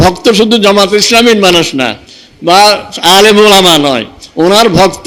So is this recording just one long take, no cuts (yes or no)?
yes